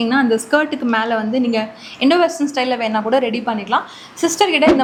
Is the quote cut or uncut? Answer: uncut